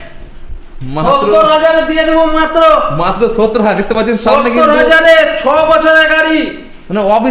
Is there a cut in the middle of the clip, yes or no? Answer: no